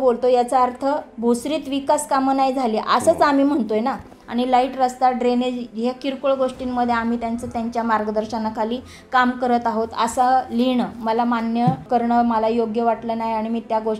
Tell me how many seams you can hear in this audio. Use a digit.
2